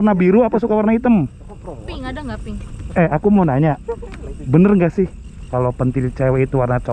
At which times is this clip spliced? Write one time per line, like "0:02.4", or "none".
0:02.8
0:05.4